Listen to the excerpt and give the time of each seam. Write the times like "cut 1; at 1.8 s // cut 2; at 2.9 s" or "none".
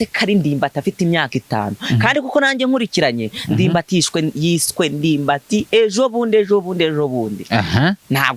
none

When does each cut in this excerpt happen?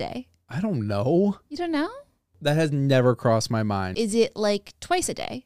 cut 1; at 3.9 s

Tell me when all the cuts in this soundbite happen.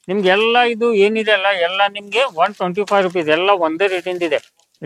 none

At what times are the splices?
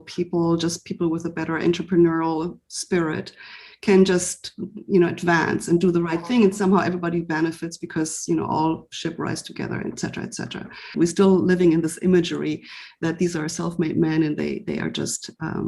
cut 1; at 10.9 s

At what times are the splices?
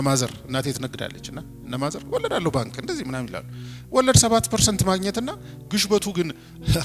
none

